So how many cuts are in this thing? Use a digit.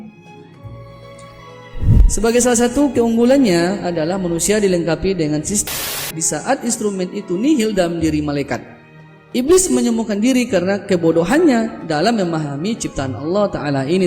1